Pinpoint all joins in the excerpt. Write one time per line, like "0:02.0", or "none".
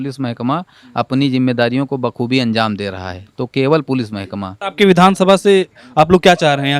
0:04.6